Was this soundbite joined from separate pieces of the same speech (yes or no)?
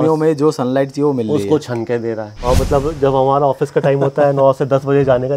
yes